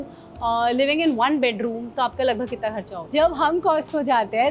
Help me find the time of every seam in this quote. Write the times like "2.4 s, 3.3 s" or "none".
3.0 s